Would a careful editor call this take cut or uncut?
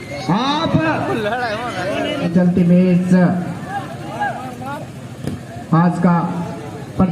cut